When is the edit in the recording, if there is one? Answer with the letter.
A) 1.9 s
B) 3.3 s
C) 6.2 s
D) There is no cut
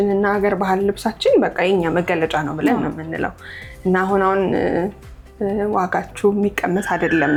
D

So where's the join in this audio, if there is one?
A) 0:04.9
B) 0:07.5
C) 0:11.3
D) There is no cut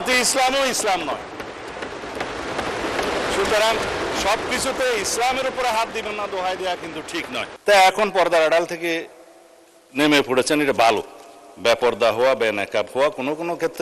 B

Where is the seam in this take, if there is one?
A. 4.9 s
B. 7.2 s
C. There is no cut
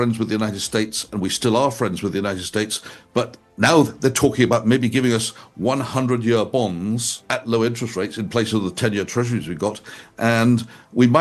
B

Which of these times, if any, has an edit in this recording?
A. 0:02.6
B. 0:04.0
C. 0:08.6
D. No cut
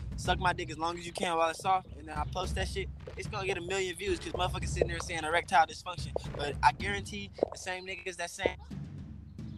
C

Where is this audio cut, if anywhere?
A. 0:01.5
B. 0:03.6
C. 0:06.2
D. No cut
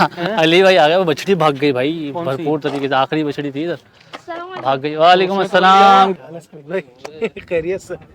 C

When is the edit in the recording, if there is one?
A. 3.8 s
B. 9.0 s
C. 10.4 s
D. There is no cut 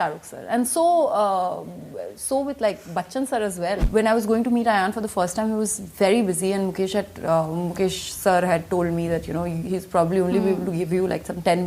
A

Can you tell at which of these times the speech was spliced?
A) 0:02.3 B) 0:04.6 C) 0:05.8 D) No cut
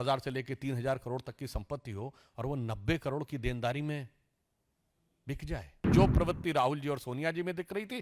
C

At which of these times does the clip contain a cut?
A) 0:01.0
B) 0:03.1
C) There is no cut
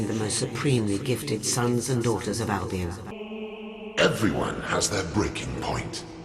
B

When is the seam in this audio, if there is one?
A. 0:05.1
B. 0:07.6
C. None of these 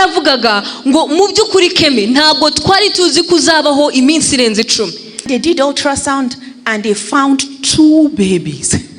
A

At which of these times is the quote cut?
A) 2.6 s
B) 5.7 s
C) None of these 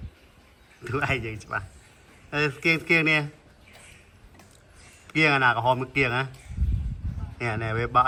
C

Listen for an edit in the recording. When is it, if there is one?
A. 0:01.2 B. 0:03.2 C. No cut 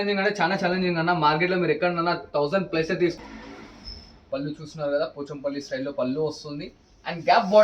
B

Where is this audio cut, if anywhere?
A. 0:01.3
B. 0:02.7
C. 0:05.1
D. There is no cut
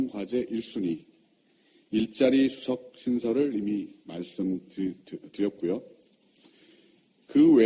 C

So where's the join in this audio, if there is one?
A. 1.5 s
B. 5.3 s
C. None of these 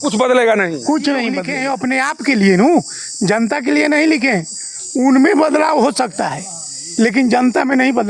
A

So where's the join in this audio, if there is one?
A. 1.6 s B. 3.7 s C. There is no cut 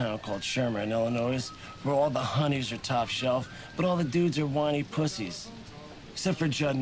C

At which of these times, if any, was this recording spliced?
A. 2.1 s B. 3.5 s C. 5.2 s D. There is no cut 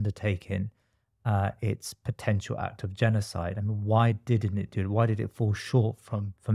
D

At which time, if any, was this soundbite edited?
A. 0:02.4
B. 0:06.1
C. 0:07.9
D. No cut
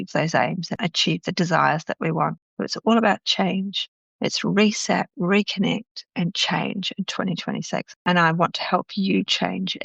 C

